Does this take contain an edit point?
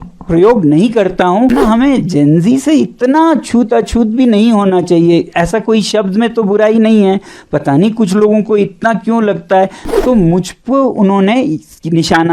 yes; 2 cuts; at 1.5 s, 9.8 s

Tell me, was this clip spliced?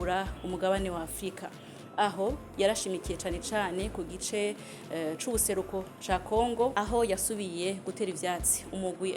no; 0 cuts

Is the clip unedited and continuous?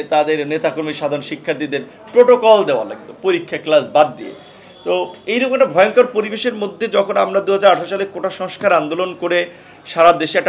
yes; 0 cuts

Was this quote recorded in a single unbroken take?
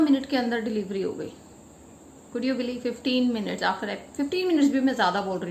yes; 0 cuts

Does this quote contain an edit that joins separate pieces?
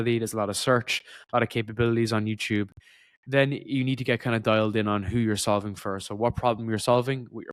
no; 0 cuts

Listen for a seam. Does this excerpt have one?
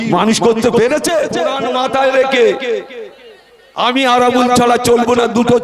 yes; 1 cut; at 1.6 s

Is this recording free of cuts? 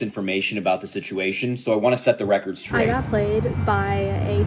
no; 1 cut; at 2.6 s

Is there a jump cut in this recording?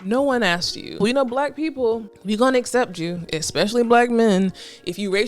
yes; 2 cuts; at 1.0 s, 2.1 s

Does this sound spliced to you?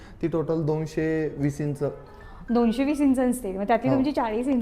no; 0 cuts

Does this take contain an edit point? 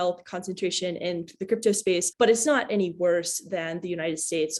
no; 0 cuts

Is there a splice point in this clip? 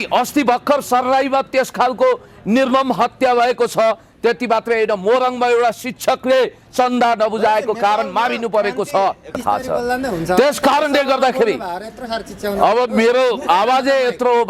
yes; 1 cut; at 9.4 s

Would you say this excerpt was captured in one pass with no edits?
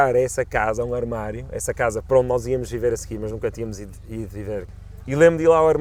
no; 1 cut; at 4.7 s

